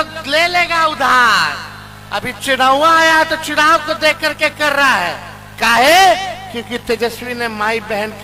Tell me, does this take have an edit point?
no; 0 cuts

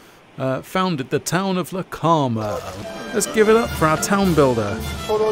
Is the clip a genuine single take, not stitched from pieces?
no; 1 cut; at 2.7 s

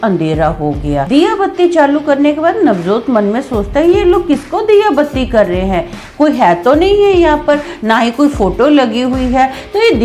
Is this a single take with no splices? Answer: no; 1 cut; at 1.0 s

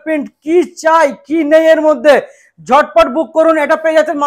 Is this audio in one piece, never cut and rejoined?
yes; 0 cuts

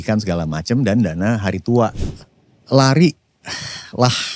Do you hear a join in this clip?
yes; 1 cut; at 2.0 s

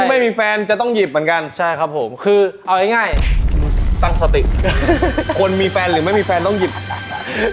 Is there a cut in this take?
no; 0 cuts

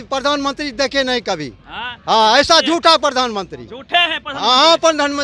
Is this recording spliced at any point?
no; 0 cuts

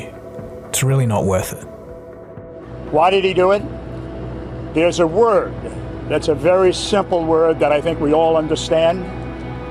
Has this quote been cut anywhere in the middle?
no; 0 cuts

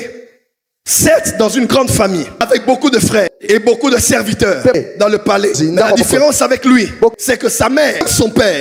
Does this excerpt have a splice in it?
no; 0 cuts

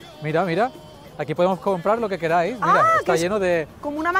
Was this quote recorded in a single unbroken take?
yes; 0 cuts

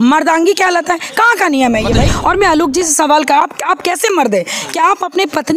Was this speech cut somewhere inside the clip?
yes; 1 cut; at 2.1 s

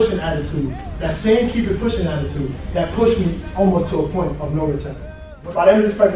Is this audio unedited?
no; 1 cut; at 5.1 s

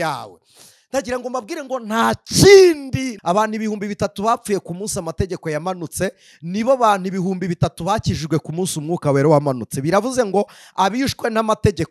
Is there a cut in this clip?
yes; 1 cut; at 3.1 s

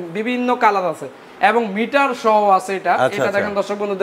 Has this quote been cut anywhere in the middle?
no; 0 cuts

